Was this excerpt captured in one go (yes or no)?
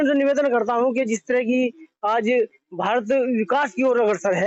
yes